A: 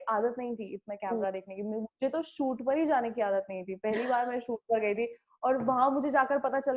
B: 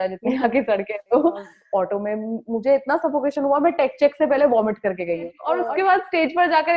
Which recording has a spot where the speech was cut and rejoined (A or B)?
B